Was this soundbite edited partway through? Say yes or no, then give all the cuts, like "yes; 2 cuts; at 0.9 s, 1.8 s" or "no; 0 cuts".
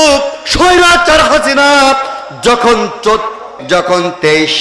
yes; 1 cut; at 3.5 s